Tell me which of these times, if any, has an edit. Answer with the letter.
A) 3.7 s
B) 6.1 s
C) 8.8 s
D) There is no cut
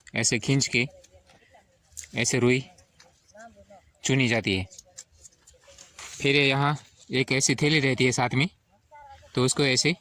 B